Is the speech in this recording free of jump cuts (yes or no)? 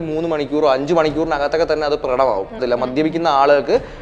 no